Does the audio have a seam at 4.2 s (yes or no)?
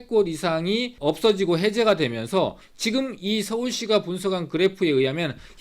no